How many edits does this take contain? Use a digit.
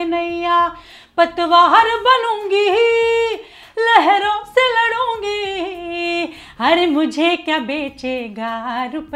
0